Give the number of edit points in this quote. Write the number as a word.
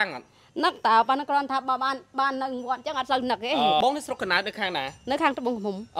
one